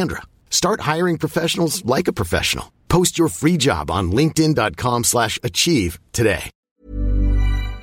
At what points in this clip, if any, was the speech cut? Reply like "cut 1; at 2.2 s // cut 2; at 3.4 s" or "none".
cut 1; at 6.6 s